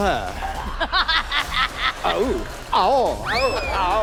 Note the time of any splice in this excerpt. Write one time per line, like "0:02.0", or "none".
none